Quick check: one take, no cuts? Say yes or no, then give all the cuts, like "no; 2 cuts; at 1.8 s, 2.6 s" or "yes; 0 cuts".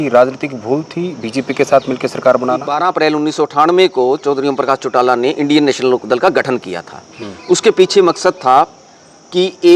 no; 1 cut; at 2.7 s